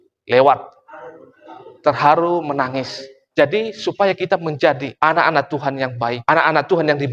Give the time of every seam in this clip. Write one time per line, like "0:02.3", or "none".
0:03.2
0:04.9
0:06.2